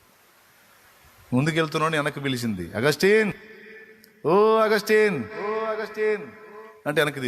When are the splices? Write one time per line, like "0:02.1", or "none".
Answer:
none